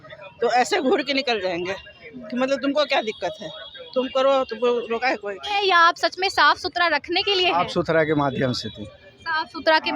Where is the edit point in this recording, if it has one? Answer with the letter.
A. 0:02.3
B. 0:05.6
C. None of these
B